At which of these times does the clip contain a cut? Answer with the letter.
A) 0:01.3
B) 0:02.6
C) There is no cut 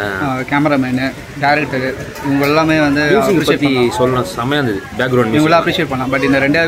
C